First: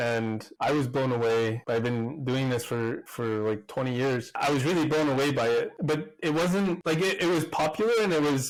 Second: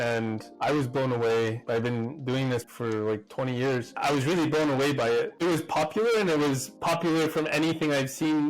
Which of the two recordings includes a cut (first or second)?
second